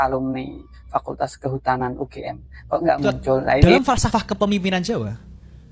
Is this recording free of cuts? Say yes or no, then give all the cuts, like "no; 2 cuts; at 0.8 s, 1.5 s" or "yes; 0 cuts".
no; 1 cut; at 3.6 s